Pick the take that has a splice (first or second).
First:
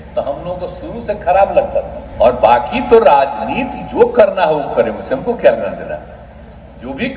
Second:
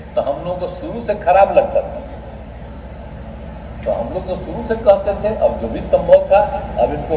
first